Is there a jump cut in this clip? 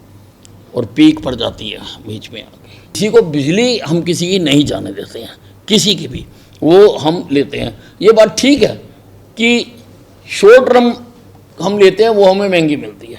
yes; 1 cut; at 3.0 s

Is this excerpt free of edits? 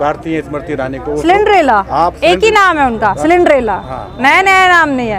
yes; 0 cuts

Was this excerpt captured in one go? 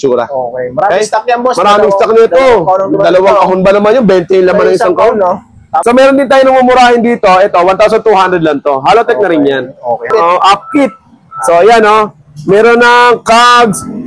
no; 2 cuts; at 5.7 s, 10.1 s

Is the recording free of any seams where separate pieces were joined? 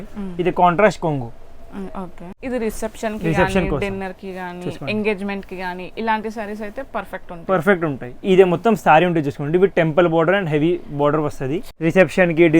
no; 2 cuts; at 2.4 s, 11.6 s

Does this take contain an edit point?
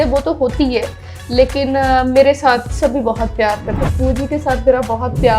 yes; 1 cut; at 3.8 s

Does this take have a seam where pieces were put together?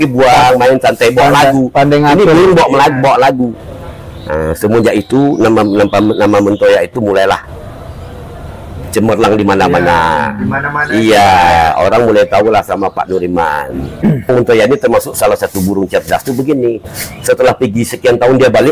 yes; 1 cut; at 14.3 s

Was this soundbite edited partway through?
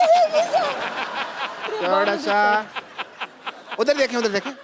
no; 0 cuts

